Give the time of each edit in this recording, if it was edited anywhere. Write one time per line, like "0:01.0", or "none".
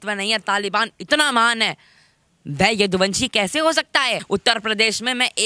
0:04.2